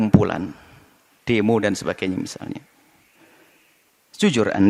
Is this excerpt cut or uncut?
uncut